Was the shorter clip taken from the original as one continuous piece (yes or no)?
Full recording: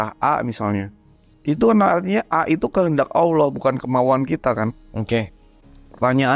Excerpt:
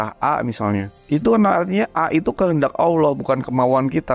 no